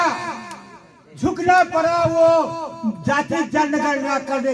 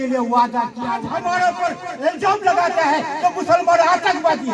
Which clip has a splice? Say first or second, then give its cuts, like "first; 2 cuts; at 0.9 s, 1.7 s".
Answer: second; 1 cut; at 1.1 s